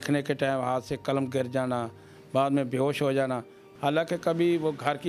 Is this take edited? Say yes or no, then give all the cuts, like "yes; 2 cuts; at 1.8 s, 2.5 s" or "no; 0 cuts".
yes; 1 cut; at 3.6 s